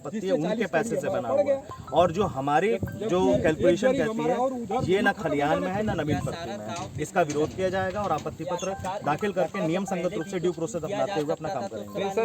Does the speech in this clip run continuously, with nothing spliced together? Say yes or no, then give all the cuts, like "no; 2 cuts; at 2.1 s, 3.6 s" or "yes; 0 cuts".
yes; 0 cuts